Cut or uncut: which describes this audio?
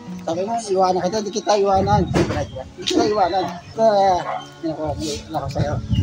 cut